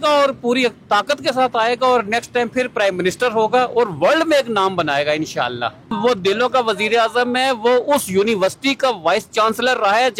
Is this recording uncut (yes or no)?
no